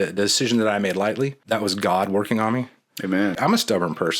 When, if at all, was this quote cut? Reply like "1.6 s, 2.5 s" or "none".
1.4 s, 3.4 s